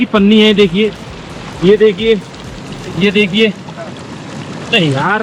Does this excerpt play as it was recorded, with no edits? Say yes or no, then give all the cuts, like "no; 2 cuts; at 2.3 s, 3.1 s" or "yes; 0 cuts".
yes; 0 cuts